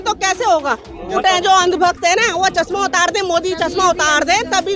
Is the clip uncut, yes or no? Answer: no